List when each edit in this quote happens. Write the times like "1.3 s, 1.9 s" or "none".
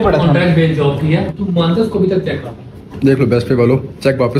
1.4 s, 2.9 s

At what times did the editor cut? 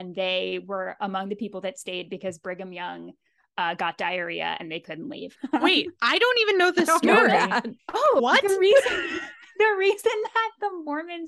5.3 s, 8.2 s

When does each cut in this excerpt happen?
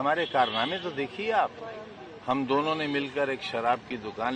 none

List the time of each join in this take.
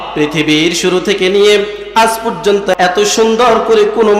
2.7 s

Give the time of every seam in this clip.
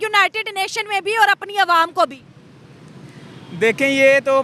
none

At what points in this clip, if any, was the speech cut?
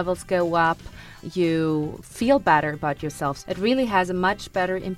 1.1 s, 2.0 s, 3.4 s

